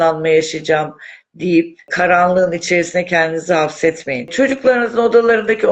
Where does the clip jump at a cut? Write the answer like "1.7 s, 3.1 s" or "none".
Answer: 1.9 s, 4.3 s